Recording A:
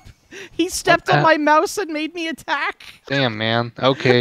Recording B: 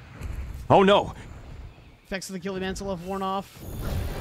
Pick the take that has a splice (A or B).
A